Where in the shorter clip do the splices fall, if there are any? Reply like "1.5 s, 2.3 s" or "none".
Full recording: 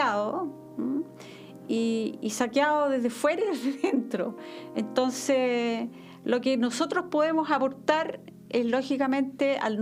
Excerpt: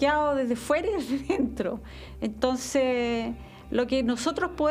none

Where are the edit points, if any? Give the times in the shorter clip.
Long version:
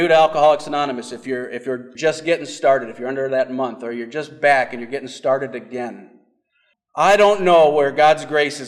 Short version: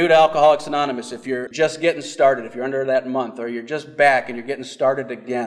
1.5 s

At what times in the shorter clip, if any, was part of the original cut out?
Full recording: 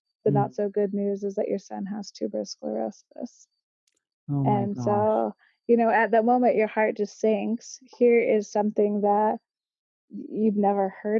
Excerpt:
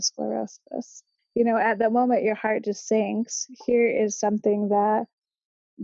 1.1 s

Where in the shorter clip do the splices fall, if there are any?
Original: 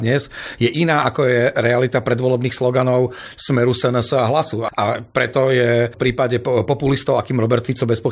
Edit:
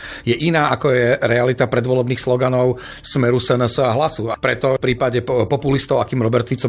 4.7 s

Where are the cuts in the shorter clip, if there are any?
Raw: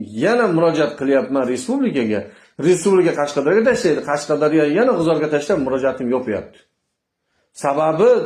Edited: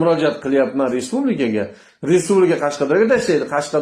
none

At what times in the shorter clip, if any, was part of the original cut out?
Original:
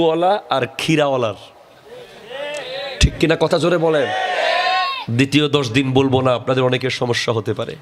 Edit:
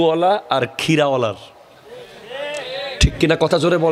none

